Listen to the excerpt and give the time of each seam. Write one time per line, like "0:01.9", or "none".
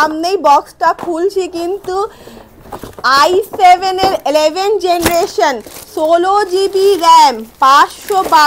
none